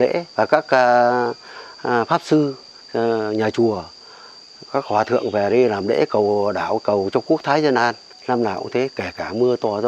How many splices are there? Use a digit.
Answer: 1